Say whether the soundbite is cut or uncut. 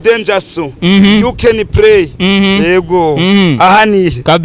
uncut